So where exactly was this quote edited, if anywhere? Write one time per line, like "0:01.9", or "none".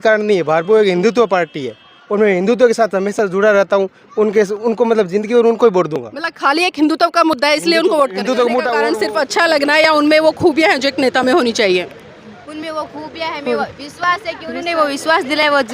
0:08.9